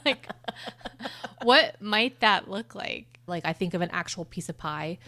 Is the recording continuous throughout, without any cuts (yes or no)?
no